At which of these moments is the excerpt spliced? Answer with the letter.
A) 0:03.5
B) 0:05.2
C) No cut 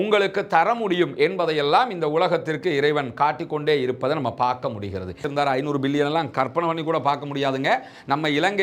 B